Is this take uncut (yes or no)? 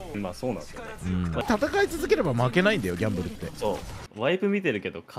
no